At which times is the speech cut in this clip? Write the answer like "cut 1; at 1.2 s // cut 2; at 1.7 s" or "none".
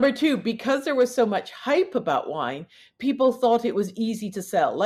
none